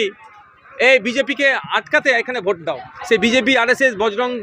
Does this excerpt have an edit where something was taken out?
yes; 1 cut; at 2.9 s

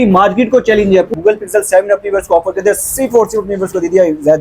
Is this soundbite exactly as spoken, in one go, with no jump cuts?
no; 1 cut; at 1.1 s

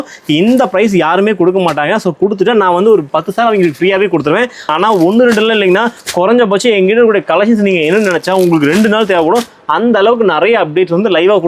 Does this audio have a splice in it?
yes; 1 cut; at 4.7 s

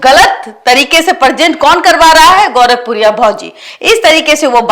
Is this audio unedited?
yes; 0 cuts

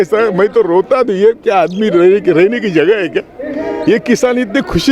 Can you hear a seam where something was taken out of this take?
no; 0 cuts

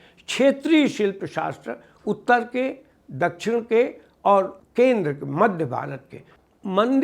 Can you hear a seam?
yes; 1 cut; at 4.6 s

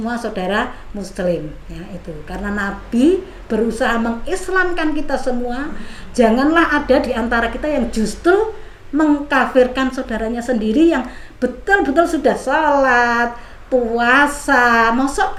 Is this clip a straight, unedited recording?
yes; 0 cuts

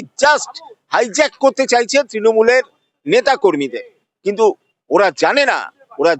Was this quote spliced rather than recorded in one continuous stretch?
no; 0 cuts

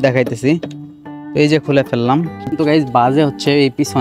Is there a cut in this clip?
yes; 1 cut; at 2.5 s

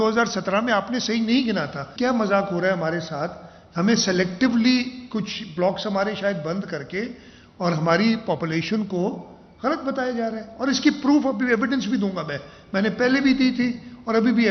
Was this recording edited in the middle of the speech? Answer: yes; 1 cut; at 1.9 s

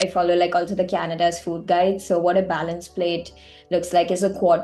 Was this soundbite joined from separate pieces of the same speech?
no; 0 cuts

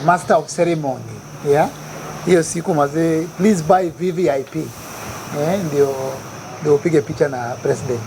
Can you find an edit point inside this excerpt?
no; 0 cuts

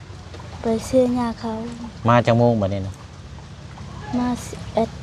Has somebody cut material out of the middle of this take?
no; 0 cuts

